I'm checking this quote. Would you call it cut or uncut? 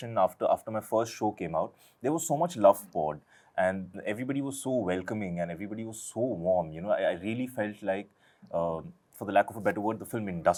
uncut